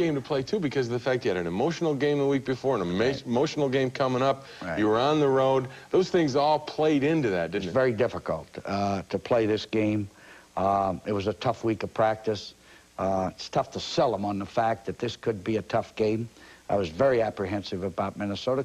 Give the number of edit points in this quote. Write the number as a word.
one